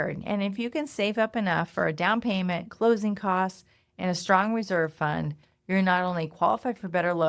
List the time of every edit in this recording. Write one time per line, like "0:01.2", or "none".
none

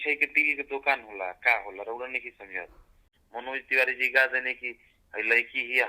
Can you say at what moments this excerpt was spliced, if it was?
0:03.1

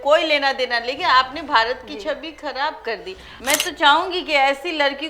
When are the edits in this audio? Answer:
0:03.3

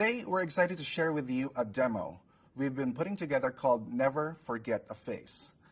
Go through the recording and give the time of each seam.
0:03.9

